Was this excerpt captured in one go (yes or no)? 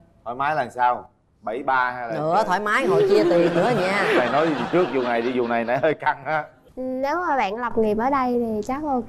no